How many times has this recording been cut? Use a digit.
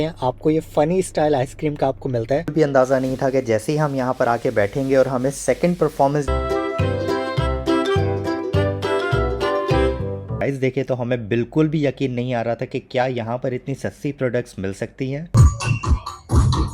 4